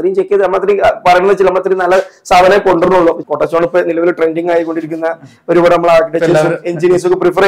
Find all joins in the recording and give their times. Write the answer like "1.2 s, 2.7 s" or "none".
3.2 s